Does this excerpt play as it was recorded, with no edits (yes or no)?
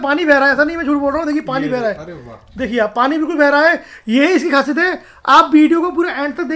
yes